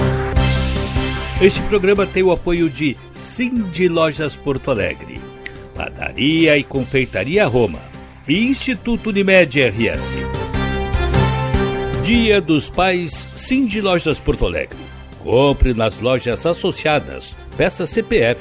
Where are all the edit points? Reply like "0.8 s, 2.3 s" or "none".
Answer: 1.2 s, 10.5 s, 12.0 s